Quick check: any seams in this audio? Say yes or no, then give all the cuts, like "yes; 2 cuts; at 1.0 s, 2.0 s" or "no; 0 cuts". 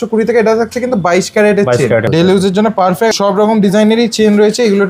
yes; 2 cuts; at 2.1 s, 3.1 s